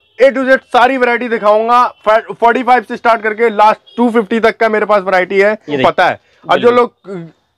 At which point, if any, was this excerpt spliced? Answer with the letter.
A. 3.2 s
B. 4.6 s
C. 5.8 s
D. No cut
C